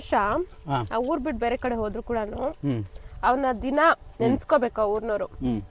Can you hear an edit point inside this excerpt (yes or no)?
no